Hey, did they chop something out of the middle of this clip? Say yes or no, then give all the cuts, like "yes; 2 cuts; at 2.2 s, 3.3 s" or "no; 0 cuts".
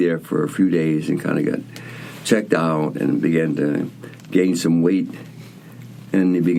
no; 0 cuts